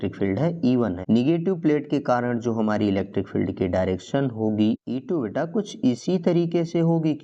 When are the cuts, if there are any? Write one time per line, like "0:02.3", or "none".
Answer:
0:01.0